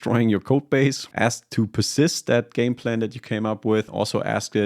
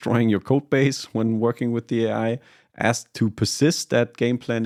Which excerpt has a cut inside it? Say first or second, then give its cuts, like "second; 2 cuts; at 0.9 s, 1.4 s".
first; 2 cuts; at 1.0 s, 3.9 s